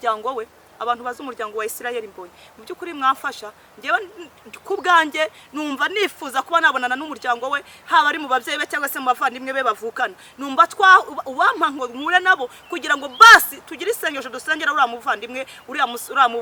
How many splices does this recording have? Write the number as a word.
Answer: zero